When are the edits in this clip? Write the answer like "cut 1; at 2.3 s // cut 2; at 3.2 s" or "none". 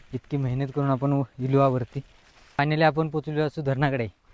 cut 1; at 2.6 s